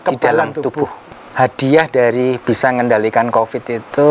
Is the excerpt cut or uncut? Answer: cut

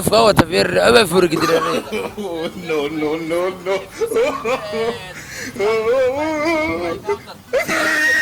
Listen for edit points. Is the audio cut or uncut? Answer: cut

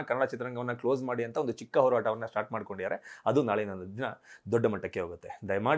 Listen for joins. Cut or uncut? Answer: uncut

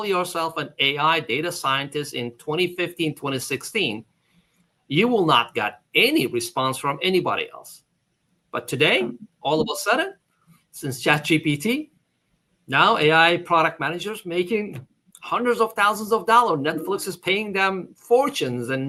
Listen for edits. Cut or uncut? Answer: uncut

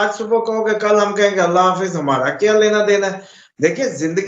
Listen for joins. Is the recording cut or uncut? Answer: uncut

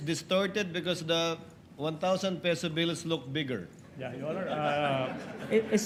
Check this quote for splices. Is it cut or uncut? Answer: uncut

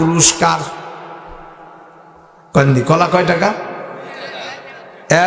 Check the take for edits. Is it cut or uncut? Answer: uncut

